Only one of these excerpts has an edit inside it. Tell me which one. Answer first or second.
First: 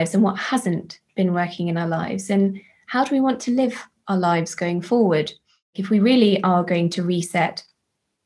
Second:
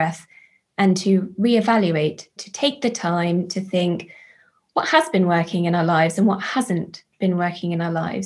first